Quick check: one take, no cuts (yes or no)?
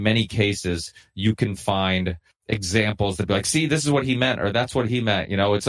no